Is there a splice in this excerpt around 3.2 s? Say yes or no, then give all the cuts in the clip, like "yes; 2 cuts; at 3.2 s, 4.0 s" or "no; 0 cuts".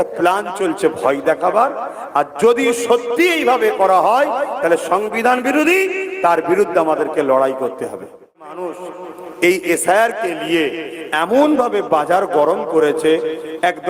no; 1 cut; at 8.6 s